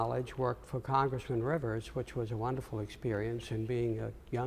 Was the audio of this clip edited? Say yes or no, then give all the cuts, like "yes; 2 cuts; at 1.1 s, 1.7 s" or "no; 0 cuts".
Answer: yes; 1 cut; at 3.2 s